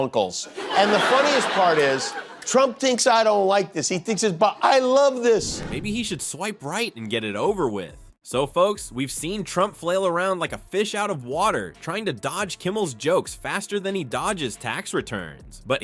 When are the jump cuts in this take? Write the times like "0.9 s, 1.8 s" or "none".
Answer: none